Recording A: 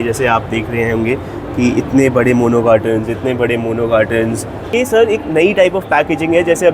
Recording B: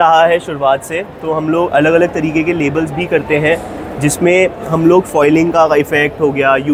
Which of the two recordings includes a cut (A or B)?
A